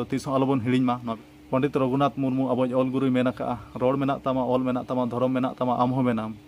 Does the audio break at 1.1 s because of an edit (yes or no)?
yes